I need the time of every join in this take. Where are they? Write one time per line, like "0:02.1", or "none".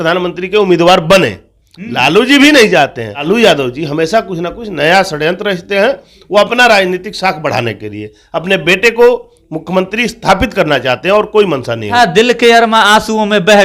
0:03.2
0:11.9